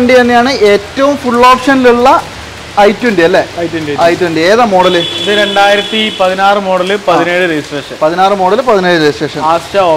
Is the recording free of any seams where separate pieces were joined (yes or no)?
yes